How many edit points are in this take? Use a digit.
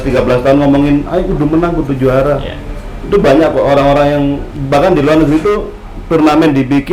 0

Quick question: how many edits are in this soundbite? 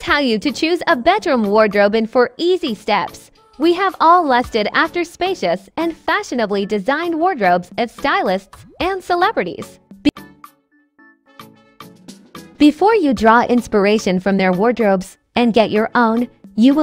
0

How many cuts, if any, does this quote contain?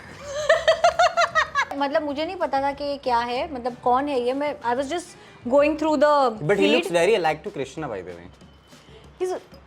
1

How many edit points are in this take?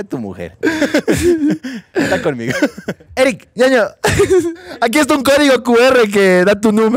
2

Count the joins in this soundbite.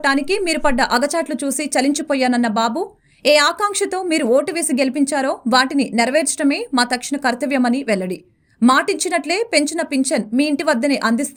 0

